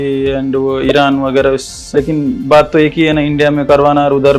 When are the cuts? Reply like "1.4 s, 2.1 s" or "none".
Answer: 1.8 s